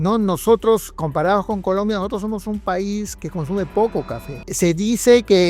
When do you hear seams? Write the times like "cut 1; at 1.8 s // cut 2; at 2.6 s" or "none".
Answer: cut 1; at 0.9 s // cut 2; at 3.1 s // cut 3; at 4.5 s